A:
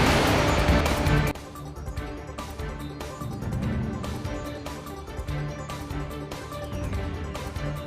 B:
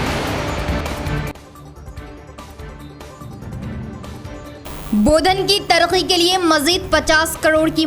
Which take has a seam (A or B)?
B